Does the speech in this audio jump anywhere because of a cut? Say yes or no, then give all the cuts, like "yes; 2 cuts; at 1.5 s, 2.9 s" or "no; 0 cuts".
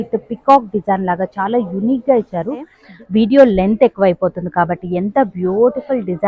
yes; 1 cut; at 2.8 s